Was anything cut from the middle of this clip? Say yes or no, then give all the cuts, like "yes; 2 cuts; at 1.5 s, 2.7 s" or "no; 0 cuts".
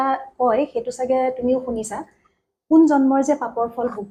no; 0 cuts